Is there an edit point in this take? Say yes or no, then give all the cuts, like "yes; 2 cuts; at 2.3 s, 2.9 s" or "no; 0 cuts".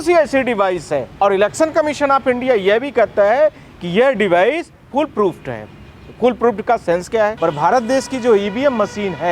yes; 2 cuts; at 1.1 s, 7.4 s